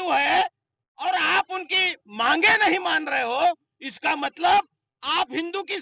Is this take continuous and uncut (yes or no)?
yes